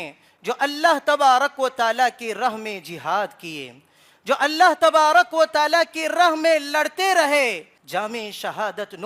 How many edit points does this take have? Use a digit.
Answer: 1